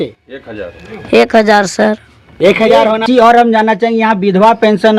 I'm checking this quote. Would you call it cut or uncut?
cut